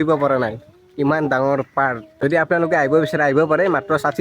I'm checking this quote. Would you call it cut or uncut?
uncut